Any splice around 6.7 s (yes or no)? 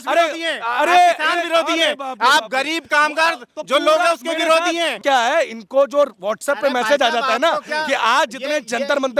no